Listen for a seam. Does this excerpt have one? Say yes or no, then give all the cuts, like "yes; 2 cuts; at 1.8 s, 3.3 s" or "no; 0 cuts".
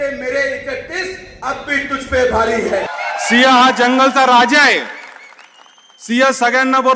yes; 1 cut; at 2.9 s